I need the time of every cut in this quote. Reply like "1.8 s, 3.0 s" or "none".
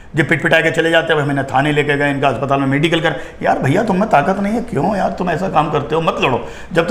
none